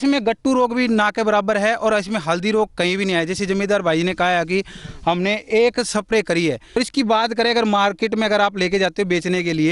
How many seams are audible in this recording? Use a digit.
1